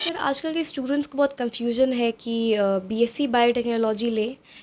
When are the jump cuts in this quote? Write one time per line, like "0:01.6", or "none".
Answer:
none